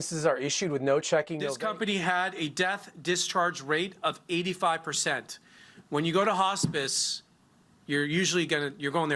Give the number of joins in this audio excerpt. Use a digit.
1